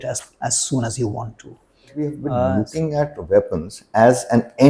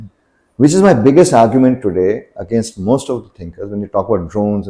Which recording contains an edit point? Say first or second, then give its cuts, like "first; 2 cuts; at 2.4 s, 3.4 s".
first; 1 cut; at 2.2 s